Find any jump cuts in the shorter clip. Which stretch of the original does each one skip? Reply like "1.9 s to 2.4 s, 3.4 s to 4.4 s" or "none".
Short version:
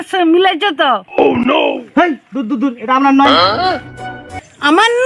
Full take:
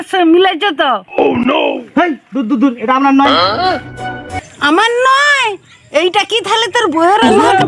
none